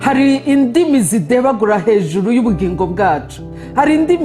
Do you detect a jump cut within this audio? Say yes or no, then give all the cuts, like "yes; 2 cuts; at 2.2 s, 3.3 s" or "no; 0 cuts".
no; 0 cuts